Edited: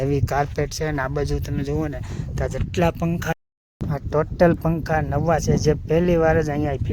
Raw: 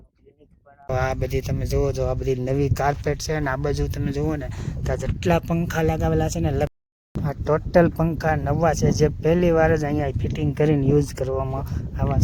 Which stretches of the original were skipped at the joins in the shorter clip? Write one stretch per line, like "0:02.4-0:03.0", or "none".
0:05.8-0:06.7